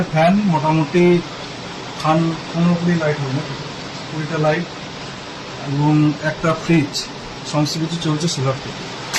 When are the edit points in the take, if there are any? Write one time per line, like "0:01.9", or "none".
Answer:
none